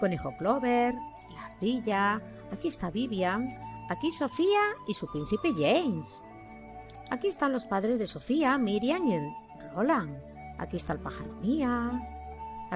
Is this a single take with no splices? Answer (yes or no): yes